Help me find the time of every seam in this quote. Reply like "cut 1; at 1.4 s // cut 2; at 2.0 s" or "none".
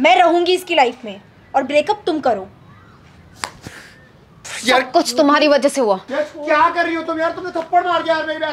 cut 1; at 4.4 s // cut 2; at 6.1 s